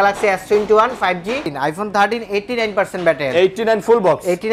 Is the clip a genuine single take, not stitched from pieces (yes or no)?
no